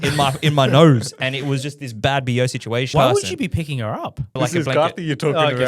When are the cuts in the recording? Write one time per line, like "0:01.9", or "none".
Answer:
0:02.9
0:04.4